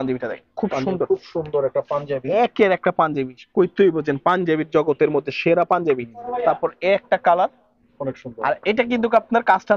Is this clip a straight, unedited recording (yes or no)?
no